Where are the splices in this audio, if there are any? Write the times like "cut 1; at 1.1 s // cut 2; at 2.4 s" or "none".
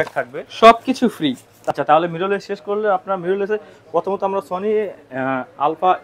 cut 1; at 1.5 s